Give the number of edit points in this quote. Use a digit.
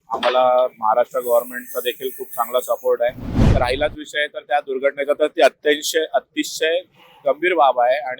1